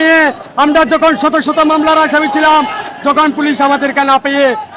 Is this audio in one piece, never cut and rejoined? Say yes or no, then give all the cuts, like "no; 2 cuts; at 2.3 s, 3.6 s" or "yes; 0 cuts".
yes; 0 cuts